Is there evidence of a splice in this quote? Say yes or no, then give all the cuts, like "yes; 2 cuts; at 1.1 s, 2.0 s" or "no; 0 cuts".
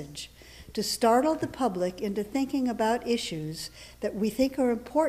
no; 0 cuts